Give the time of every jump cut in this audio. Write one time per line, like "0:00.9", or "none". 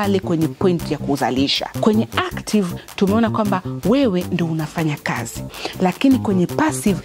0:01.6